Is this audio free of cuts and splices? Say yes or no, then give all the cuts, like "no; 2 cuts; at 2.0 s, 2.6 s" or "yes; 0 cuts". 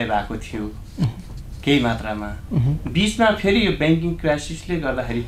yes; 0 cuts